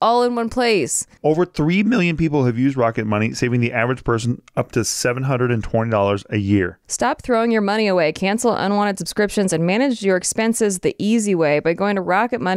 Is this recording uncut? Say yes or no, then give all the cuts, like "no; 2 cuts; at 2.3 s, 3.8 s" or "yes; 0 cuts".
no; 1 cut; at 1.1 s